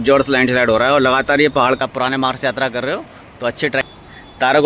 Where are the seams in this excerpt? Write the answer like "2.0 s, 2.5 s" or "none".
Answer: 1.8 s, 3.9 s